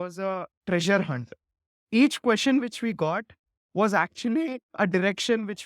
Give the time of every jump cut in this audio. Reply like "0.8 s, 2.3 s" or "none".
4.7 s